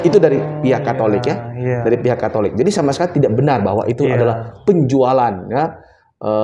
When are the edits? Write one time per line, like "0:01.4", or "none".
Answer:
none